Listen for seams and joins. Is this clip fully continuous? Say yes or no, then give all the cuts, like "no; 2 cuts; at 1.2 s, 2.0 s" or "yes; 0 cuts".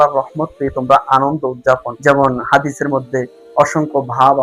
no; 1 cut; at 1.9 s